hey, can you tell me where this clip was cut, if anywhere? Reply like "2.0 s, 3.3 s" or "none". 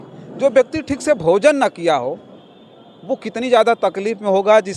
none

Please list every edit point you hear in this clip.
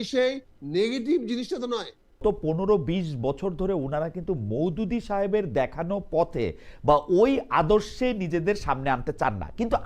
2.2 s

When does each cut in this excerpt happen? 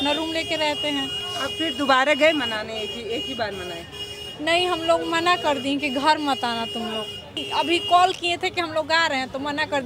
1.2 s, 7.4 s

